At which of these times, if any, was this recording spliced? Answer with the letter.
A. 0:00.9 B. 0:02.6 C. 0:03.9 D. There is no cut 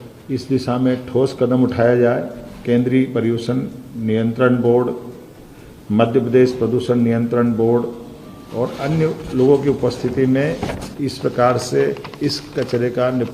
B